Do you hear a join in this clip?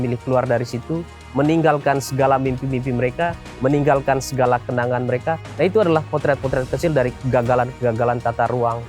yes; 1 cut; at 5.5 s

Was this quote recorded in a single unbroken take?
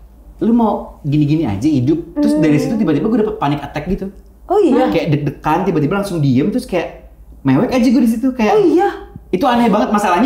yes; 0 cuts

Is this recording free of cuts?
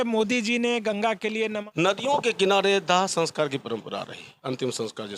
no; 1 cut; at 1.6 s

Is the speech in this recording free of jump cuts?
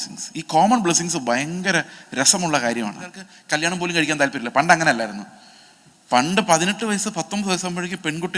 no; 1 cut; at 3.3 s

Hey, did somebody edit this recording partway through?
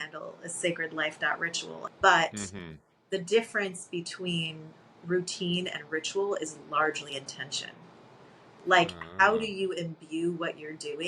yes; 1 cut; at 1.8 s

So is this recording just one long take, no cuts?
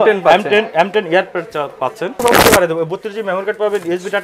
no; 1 cut; at 2.2 s

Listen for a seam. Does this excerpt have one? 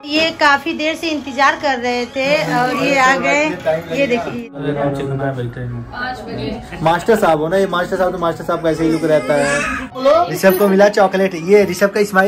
yes; 2 cuts; at 4.5 s, 9.9 s

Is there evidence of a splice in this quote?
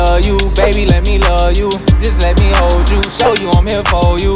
no; 0 cuts

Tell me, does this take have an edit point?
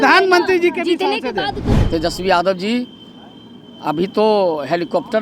yes; 1 cut; at 1.7 s

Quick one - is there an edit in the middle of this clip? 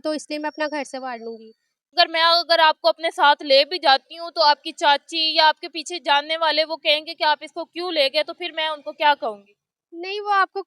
yes; 1 cut; at 1.9 s

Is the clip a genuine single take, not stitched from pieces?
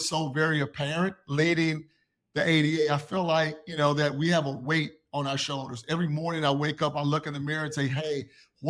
yes; 0 cuts

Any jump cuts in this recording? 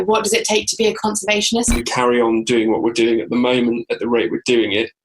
yes; 1 cut; at 1.6 s

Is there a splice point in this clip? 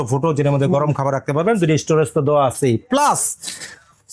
no; 0 cuts

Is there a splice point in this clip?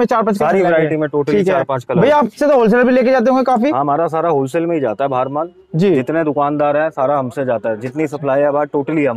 yes; 1 cut; at 1.8 s

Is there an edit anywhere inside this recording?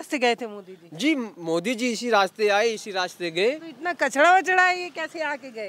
no; 0 cuts

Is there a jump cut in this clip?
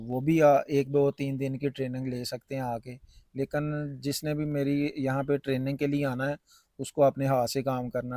no; 0 cuts

